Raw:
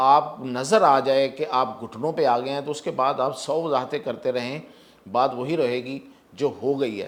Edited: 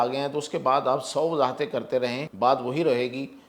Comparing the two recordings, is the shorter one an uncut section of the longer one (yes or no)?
no